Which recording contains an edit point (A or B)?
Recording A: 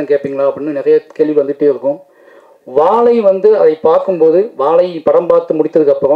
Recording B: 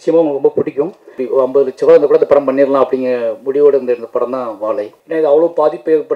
B